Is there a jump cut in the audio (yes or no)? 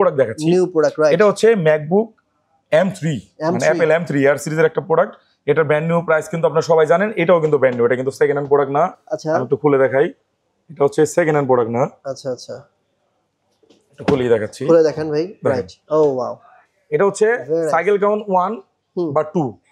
no